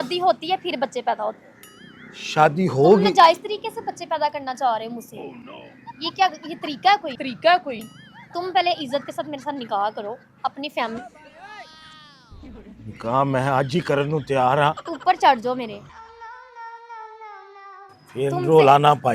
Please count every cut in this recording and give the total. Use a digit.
1